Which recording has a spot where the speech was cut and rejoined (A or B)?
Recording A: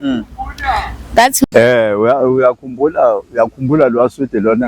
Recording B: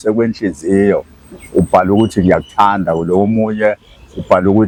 A